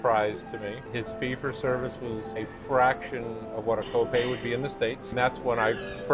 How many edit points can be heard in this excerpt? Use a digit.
3